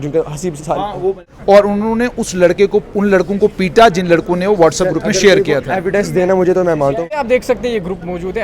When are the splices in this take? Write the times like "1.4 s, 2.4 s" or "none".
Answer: 1.3 s, 7.2 s